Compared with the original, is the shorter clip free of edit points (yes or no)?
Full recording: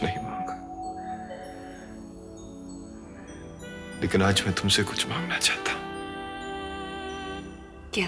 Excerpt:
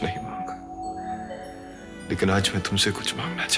no